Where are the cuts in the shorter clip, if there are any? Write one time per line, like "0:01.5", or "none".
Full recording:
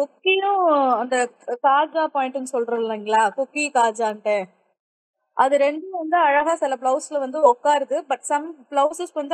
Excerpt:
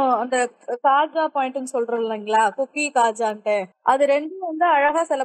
0:03.7